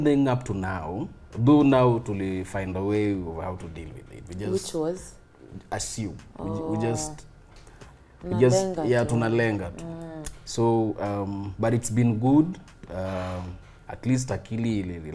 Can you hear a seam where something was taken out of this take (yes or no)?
no